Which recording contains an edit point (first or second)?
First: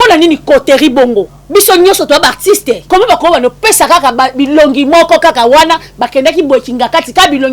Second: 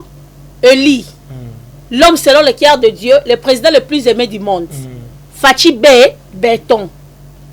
first